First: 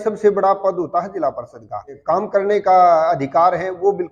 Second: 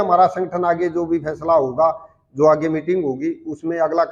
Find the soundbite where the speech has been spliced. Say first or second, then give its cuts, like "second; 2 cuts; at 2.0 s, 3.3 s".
first; 1 cut; at 1.9 s